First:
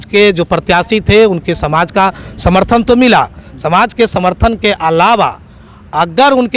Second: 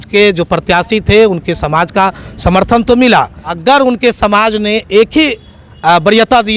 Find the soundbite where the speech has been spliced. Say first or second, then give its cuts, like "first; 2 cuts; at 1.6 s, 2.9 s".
second; 1 cut; at 3.4 s